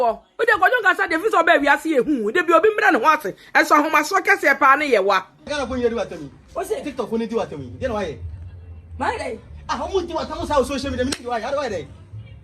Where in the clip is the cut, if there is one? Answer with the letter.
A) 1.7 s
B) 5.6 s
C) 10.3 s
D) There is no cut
B